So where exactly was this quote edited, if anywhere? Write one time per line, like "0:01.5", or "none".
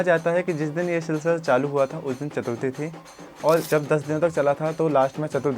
0:03.7